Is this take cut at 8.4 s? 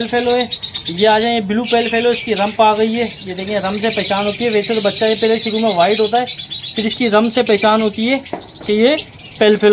no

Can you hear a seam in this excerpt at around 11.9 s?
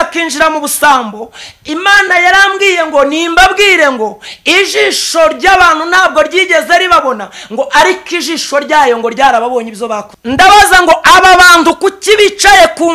no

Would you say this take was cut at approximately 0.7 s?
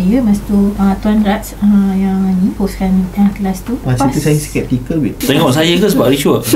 yes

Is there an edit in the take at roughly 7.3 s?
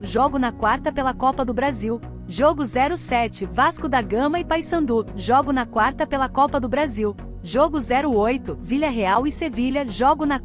yes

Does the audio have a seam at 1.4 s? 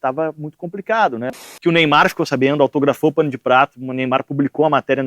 yes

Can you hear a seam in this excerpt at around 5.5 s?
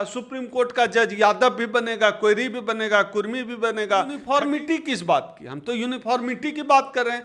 no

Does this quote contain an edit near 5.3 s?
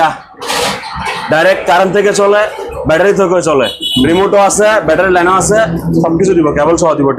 no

